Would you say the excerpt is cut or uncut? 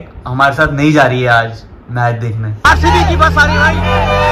cut